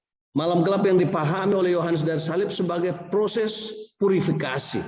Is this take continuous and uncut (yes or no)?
yes